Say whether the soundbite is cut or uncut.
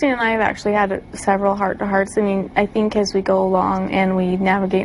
uncut